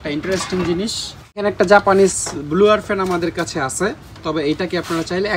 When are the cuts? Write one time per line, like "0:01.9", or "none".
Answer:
0:01.4